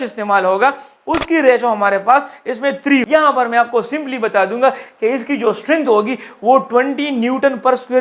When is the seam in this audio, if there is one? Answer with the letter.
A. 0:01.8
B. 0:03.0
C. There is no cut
B